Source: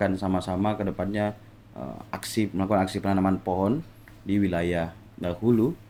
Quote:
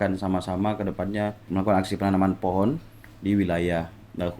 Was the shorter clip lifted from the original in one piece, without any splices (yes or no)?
no